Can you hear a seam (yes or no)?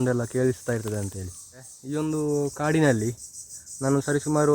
yes